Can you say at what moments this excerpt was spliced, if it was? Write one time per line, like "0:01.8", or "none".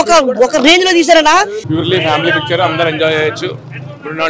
0:01.6